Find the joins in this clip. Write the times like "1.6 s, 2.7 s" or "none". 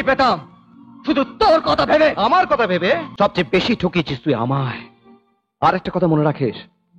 3.1 s